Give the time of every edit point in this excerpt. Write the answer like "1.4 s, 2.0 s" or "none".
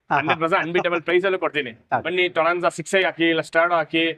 2.1 s